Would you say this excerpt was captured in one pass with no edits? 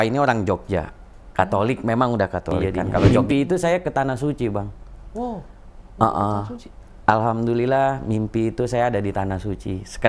no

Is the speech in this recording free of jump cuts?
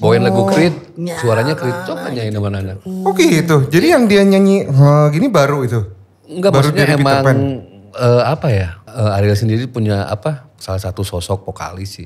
no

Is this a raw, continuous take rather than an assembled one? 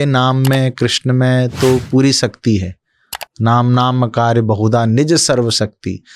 yes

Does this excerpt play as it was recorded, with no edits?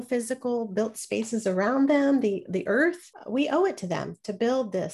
no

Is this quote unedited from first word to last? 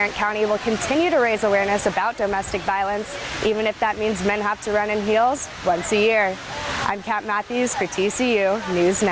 yes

